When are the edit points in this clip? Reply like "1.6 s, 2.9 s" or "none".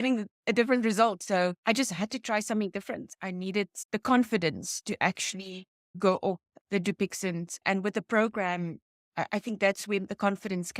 1.5 s, 3.1 s, 5.8 s